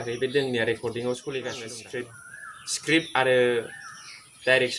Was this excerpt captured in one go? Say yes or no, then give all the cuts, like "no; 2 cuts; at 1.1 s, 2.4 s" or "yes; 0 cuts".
no; 1 cut; at 1.8 s